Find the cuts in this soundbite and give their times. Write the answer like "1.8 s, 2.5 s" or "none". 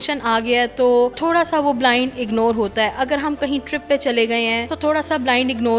1.2 s, 4.7 s